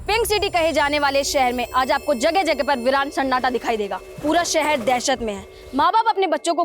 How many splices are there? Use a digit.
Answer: 1